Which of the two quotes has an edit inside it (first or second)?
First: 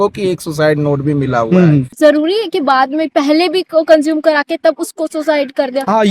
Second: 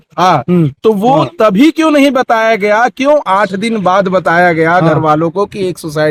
first